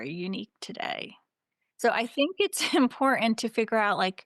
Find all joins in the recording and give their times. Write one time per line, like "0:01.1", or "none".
none